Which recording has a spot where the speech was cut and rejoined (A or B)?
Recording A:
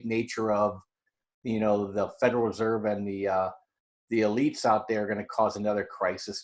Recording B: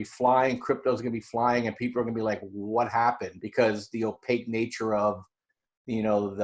B